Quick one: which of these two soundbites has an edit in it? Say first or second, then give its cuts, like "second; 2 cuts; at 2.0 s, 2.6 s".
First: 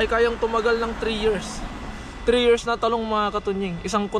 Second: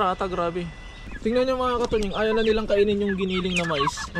second; 1 cut; at 1.3 s